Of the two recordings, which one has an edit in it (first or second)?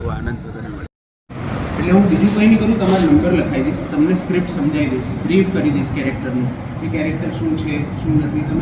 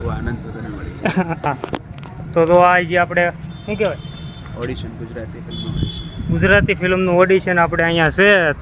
first